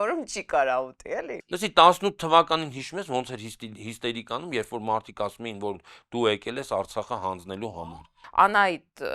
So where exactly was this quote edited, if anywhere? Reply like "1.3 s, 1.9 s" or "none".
1.4 s, 7.7 s